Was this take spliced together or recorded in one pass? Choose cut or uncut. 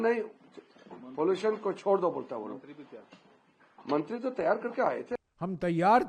cut